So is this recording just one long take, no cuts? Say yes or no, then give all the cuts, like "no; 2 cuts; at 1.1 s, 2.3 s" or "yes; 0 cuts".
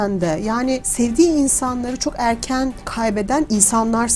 no; 2 cuts; at 0.9 s, 3.1 s